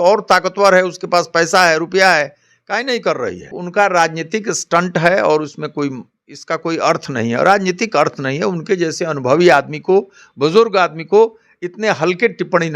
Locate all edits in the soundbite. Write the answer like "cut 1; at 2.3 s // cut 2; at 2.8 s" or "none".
cut 1; at 3.6 s